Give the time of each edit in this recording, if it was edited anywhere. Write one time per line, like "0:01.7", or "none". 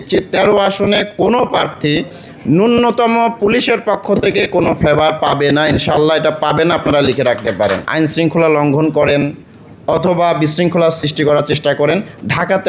0:07.8